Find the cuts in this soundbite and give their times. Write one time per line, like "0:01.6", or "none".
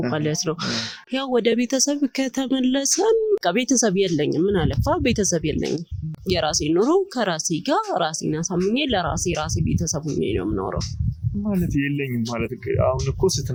none